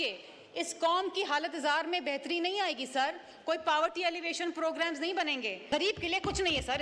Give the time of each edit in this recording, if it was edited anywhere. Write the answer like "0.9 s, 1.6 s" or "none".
5.6 s